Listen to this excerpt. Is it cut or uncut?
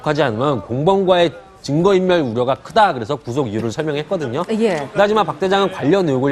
uncut